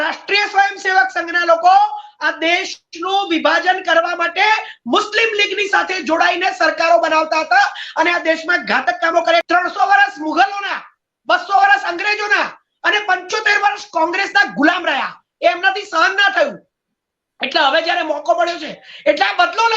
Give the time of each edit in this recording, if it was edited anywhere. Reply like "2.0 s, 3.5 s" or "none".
9.4 s